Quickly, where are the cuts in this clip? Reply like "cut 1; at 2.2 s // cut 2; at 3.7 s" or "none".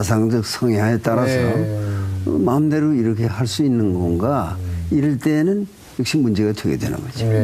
cut 1; at 5.0 s